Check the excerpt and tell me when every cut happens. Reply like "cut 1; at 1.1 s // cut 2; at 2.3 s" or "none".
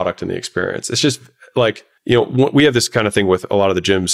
cut 1; at 1.9 s